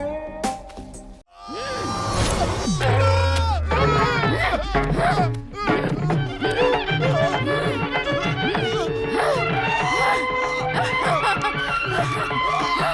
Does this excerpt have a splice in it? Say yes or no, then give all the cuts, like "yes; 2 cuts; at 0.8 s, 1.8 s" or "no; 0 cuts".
yes; 1 cut; at 1.4 s